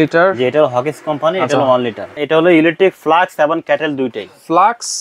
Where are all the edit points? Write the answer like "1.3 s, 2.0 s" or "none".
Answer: 2.1 s